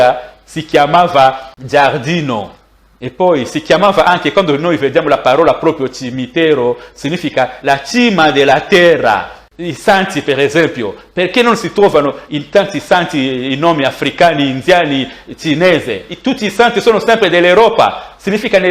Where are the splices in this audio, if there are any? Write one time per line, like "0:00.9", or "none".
0:01.5
0:09.4